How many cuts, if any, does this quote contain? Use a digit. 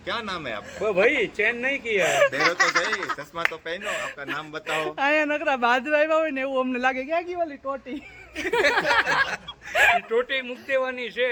0